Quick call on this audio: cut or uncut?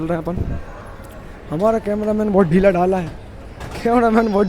uncut